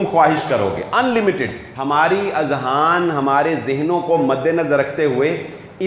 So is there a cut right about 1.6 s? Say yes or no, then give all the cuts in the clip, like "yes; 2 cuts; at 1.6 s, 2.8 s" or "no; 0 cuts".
yes; 1 cut; at 1.6 s